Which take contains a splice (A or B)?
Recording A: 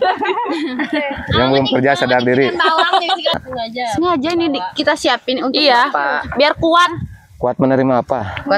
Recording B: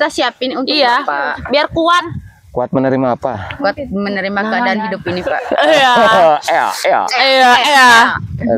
A